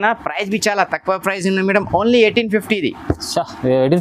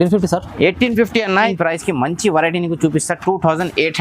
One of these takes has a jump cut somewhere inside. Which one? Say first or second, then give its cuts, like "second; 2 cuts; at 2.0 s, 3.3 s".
second; 1 cut; at 1.5 s